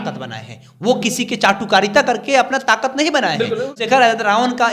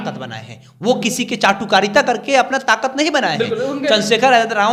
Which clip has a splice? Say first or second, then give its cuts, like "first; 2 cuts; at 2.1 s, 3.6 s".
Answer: first; 1 cut; at 3.8 s